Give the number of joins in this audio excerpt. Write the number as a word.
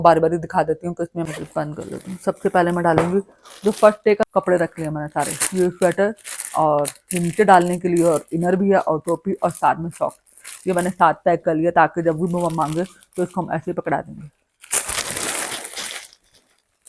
two